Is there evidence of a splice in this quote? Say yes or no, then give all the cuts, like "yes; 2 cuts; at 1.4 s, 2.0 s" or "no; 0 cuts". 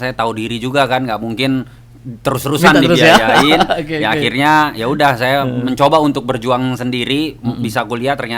no; 0 cuts